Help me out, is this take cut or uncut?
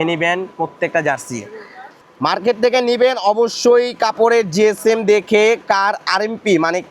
cut